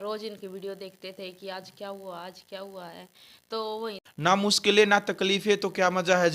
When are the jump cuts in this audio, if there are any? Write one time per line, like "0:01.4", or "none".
0:04.0